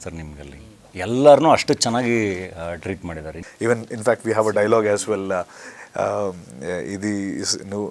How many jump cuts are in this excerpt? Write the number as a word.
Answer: one